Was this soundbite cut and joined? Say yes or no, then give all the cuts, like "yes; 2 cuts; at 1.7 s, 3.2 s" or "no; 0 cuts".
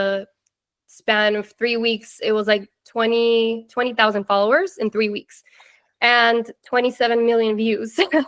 no; 0 cuts